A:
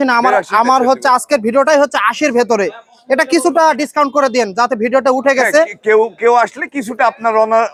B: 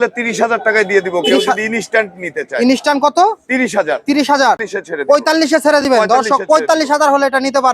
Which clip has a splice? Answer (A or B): B